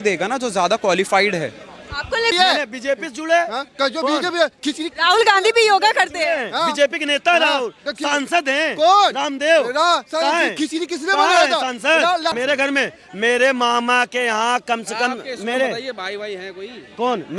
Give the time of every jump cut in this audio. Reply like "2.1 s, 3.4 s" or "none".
2.3 s, 12.3 s